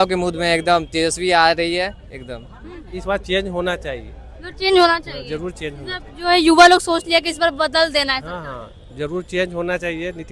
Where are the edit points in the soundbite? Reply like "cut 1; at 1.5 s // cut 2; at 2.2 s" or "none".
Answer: cut 1; at 3.0 s